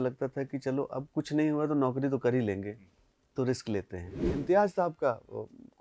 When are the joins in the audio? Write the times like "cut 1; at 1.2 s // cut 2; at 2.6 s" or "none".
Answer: cut 1; at 4.3 s